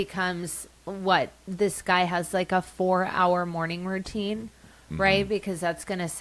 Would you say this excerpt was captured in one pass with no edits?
yes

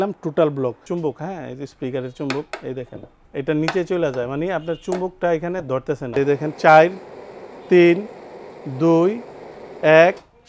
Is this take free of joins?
no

